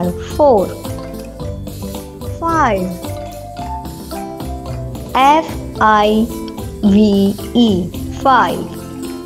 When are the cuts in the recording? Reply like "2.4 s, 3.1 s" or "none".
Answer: 3.5 s, 5.1 s

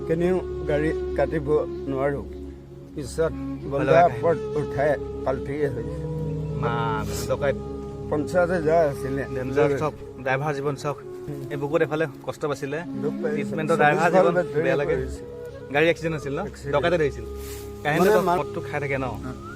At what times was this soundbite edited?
11.2 s, 18.4 s

